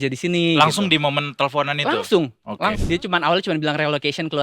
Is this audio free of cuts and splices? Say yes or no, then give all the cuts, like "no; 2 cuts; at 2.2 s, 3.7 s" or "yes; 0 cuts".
no; 1 cut; at 2.8 s